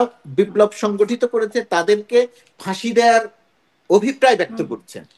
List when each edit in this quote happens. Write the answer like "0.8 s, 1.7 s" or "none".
none